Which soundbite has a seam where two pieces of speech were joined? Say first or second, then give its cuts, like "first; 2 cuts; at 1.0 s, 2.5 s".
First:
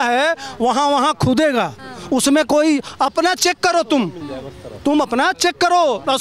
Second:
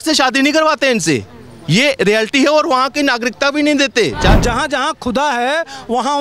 second; 1 cut; at 4.4 s